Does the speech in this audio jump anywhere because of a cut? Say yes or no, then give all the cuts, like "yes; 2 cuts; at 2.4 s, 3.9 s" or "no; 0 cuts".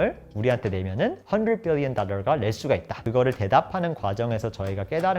yes; 2 cuts; at 1.2 s, 2.9 s